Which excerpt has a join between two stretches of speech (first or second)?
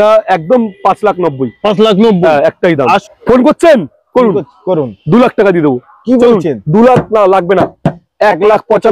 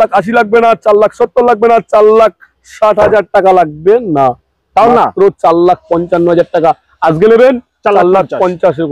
first